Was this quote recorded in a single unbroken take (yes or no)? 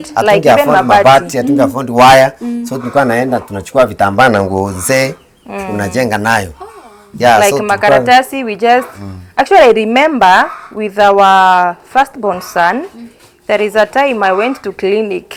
yes